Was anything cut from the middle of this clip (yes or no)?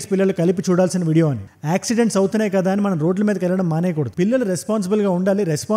no